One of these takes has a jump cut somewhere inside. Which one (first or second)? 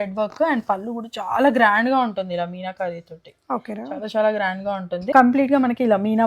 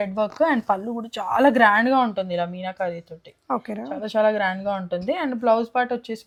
first